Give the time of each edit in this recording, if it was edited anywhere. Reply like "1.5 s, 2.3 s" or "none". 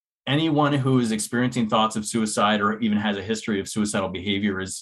none